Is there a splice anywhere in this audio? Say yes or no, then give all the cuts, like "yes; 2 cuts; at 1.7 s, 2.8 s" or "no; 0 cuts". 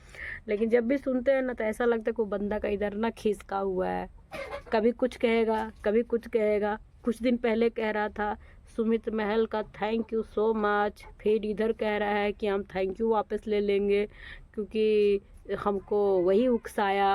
no; 0 cuts